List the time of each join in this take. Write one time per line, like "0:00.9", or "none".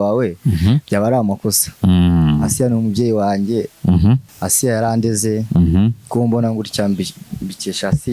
0:04.3